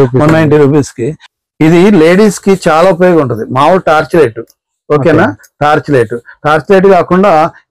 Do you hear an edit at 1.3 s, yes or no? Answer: yes